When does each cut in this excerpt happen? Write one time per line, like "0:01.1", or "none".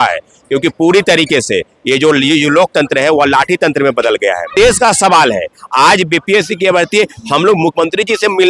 0:04.5